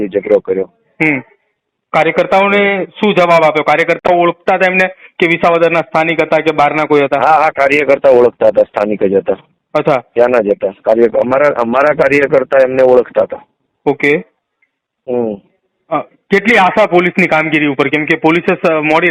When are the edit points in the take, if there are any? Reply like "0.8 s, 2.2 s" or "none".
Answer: none